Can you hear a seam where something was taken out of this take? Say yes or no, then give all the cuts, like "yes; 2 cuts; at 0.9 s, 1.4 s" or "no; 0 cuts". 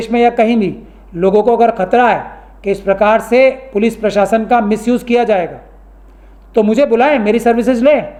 no; 0 cuts